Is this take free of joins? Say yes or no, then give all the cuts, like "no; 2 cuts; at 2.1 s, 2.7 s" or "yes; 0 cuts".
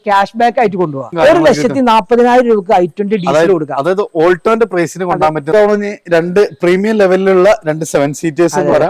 no; 2 cuts; at 1.1 s, 5.5 s